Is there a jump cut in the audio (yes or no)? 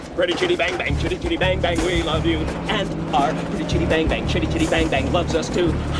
no